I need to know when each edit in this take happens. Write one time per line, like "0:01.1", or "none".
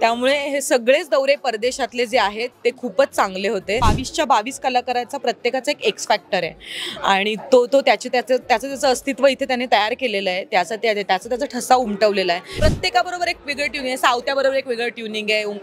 0:03.8
0:12.5